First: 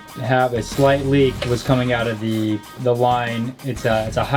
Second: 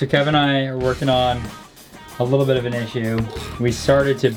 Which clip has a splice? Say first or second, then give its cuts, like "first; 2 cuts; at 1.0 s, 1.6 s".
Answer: first; 2 cuts; at 1.3 s, 2.7 s